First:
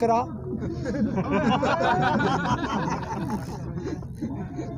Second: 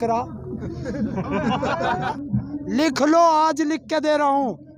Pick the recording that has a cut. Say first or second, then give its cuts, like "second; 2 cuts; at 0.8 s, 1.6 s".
second; 1 cut; at 2.1 s